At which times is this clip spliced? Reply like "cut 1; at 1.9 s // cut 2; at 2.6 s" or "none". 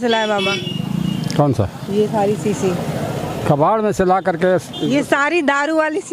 none